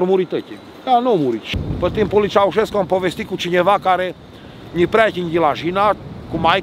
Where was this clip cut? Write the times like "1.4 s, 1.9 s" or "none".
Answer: 1.5 s